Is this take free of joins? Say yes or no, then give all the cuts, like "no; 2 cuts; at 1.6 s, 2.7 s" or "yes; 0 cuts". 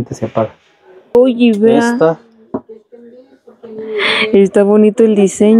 no; 1 cut; at 1.1 s